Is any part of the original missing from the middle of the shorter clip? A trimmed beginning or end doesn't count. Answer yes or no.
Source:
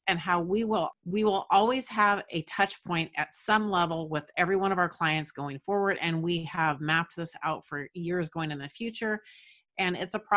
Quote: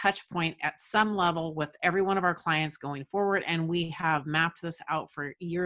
no